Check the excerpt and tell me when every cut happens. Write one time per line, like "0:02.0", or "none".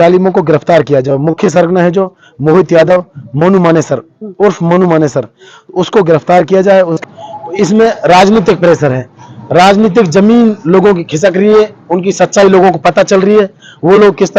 0:07.0